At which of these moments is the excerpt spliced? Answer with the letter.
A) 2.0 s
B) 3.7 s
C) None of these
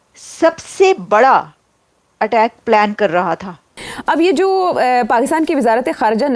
B